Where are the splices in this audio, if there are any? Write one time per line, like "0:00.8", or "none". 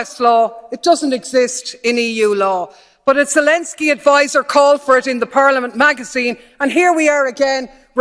0:02.7